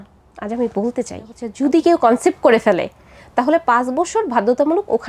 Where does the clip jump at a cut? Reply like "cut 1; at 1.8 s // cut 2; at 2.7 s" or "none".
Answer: cut 1; at 1.4 s